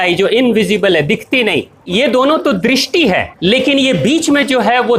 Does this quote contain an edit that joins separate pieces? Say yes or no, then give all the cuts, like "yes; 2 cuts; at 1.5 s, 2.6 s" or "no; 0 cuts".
yes; 2 cuts; at 1.8 s, 3.3 s